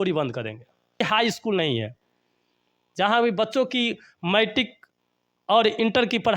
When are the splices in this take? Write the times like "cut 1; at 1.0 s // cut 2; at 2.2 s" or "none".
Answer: cut 1; at 1.0 s